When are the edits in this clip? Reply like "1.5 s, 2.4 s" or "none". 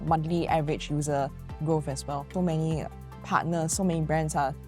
2.3 s